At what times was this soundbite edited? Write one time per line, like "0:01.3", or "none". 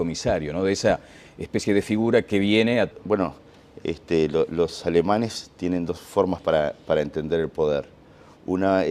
none